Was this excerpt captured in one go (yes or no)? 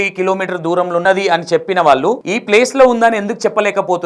no